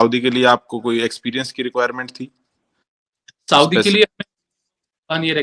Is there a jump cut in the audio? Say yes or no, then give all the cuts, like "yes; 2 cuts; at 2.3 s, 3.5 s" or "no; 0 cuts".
no; 0 cuts